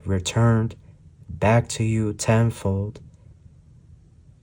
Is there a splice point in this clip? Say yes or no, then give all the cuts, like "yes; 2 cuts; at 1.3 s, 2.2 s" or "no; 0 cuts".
no; 0 cuts